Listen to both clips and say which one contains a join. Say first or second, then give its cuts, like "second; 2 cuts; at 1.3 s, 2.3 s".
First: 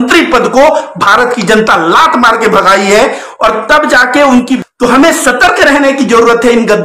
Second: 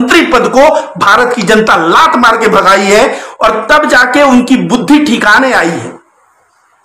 first; 1 cut; at 4.6 s